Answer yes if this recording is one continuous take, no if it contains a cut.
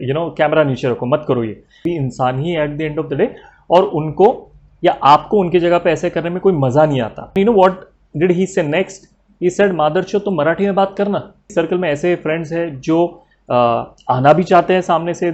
no